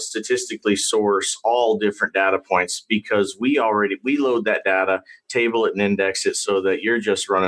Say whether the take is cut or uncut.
uncut